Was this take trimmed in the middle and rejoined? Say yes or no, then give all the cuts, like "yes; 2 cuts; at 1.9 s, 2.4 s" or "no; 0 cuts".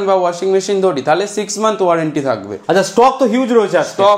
no; 0 cuts